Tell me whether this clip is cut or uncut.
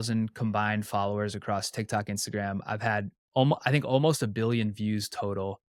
uncut